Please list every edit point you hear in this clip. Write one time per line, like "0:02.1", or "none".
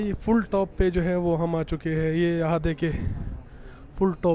none